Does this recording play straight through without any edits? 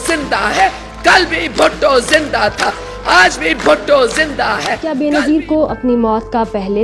no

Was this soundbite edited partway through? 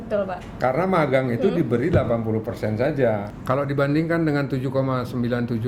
yes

